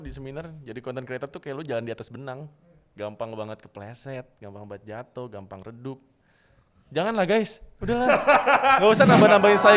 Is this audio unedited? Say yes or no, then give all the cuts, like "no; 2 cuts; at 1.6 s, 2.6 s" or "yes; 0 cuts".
yes; 0 cuts